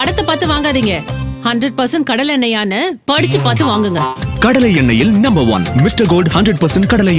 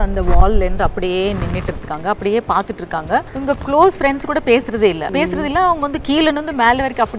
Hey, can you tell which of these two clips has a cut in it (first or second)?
second